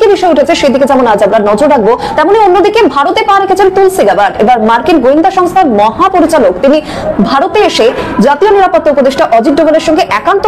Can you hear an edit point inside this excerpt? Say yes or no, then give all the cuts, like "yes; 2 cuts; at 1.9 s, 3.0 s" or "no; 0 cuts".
no; 0 cuts